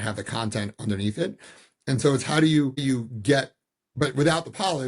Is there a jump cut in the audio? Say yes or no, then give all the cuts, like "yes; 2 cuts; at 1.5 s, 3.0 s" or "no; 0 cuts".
yes; 1 cut; at 2.8 s